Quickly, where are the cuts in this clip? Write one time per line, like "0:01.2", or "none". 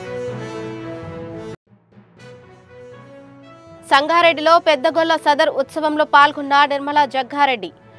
0:01.2